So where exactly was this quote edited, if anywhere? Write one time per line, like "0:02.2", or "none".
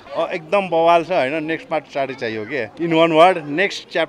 none